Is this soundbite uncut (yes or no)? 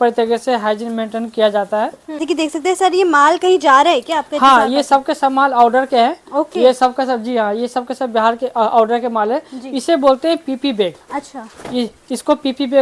no